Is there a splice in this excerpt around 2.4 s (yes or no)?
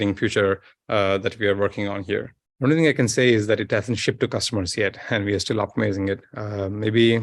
yes